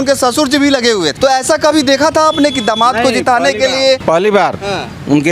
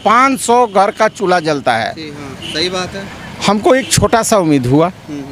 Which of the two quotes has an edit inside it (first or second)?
first